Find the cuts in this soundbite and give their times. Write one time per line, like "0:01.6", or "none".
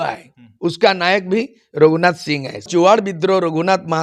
0:02.7